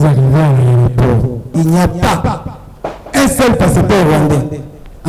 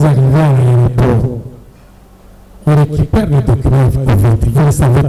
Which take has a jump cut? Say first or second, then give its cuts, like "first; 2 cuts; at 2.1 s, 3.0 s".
first; 1 cut; at 1.5 s